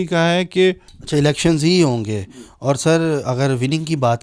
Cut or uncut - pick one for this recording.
cut